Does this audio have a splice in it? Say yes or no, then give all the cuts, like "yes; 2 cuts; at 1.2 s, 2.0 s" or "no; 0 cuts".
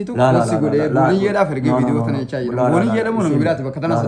no; 0 cuts